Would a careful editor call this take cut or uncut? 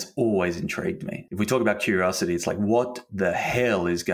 cut